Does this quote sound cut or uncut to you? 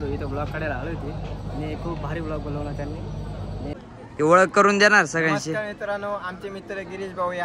cut